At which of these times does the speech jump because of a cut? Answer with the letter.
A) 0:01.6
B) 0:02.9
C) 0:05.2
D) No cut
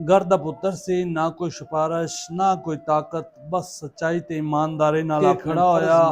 C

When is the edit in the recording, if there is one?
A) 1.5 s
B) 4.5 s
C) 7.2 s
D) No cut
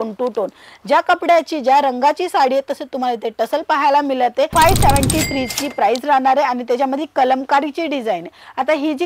B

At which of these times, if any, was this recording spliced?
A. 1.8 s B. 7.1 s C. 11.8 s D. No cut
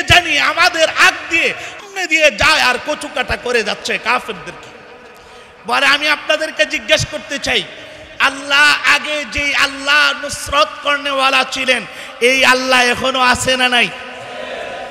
A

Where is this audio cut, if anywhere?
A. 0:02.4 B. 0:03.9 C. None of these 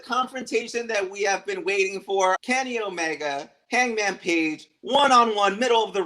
A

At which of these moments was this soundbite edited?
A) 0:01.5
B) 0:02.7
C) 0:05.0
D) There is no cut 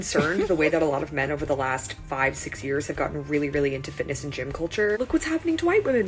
C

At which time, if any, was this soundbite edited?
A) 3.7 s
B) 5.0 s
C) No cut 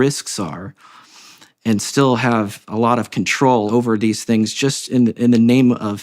A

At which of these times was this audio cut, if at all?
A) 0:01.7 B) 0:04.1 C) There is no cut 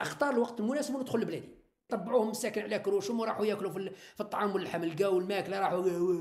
A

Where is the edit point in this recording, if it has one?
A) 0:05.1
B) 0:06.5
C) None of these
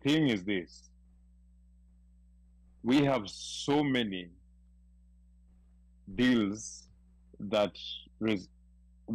C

